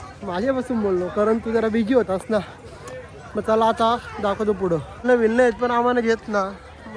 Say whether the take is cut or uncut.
uncut